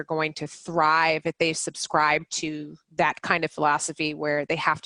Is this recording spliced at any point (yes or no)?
no